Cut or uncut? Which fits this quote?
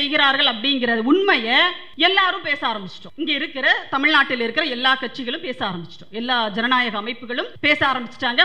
cut